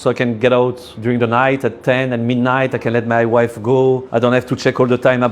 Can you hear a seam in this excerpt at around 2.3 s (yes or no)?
no